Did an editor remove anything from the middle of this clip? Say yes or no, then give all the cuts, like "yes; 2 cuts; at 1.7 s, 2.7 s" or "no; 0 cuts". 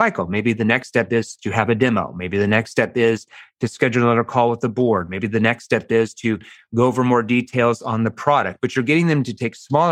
no; 0 cuts